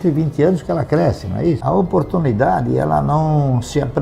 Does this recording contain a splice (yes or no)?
yes